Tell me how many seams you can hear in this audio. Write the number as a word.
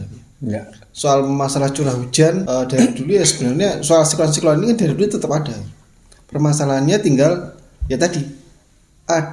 one